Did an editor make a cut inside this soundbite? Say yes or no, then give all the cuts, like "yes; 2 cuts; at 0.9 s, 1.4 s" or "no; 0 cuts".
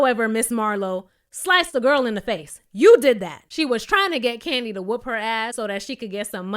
yes; 2 cuts; at 3.4 s, 5.5 s